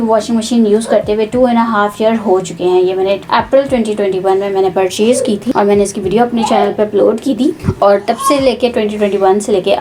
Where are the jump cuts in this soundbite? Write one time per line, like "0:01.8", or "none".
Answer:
none